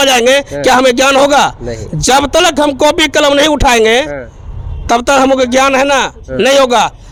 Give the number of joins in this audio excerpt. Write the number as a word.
zero